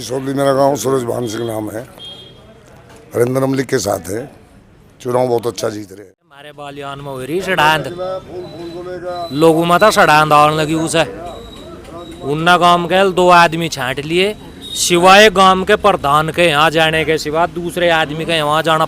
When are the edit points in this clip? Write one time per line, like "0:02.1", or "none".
0:06.7